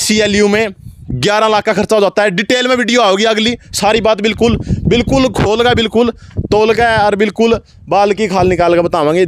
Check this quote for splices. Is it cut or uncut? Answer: uncut